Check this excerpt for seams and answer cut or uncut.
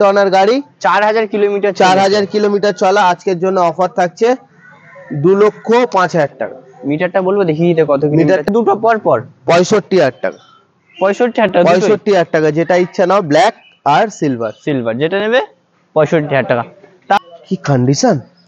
cut